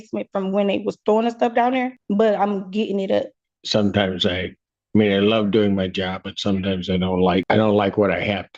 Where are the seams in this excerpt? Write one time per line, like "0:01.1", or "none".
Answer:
0:02.0
0:03.5
0:07.4